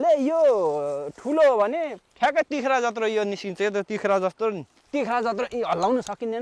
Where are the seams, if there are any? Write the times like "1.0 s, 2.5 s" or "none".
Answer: 2.0 s, 4.7 s